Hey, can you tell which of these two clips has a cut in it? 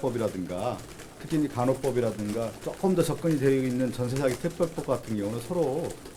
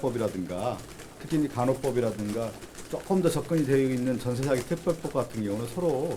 first; 1 cut; at 2.6 s

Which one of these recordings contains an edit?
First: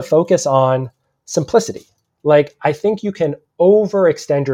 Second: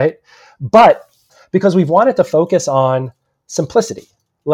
second; 1 cut; at 1.3 s

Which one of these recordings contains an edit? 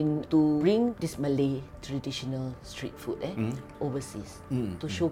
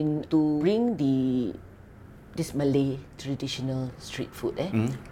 first; 2 cuts; at 0.9 s, 3.7 s

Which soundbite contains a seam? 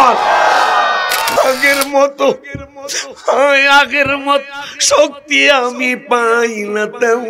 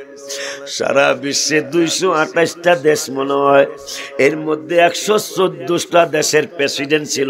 first; 1 cut; at 1.3 s

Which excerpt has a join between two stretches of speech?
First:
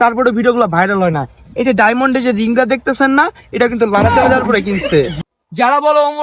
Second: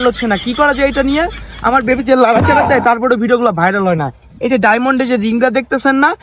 first; 1 cut; at 5.2 s

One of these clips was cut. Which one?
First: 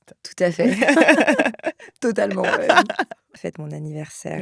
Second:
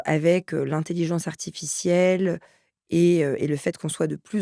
first; 1 cut; at 3.3 s

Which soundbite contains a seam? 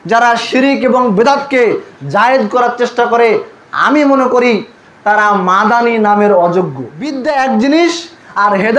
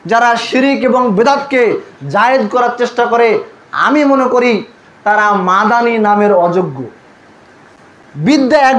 first; 1 cut; at 7.2 s

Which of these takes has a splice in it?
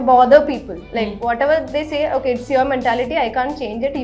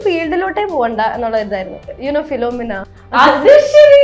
second; 2 cuts; at 1.9 s, 2.9 s

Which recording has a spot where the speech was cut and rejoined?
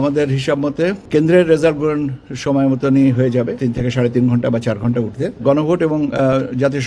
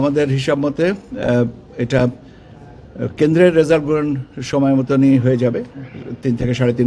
first; 3 cuts; at 1.0 s, 3.5 s, 5.4 s

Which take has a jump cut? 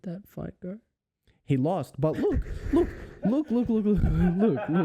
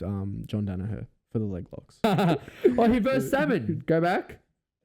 second; 1 cut; at 2.0 s

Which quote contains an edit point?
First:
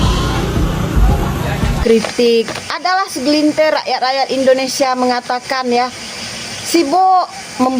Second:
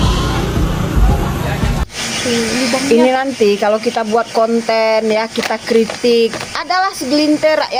first; 1 cut; at 1.8 s

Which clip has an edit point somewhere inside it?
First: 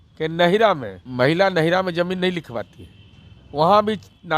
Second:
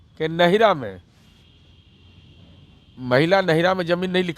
first; 1 cut; at 1.0 s

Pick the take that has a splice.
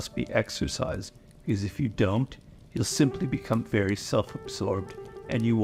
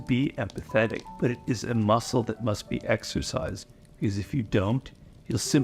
second; 1 cut; at 1.1 s

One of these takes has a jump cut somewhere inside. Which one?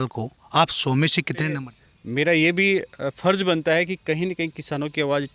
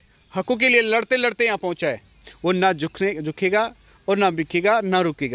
first; 1 cut; at 1.6 s

